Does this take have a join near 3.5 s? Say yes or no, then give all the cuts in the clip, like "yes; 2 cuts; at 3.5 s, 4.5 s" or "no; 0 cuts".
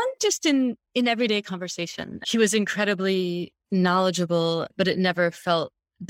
yes; 2 cuts; at 2.2 s, 3.5 s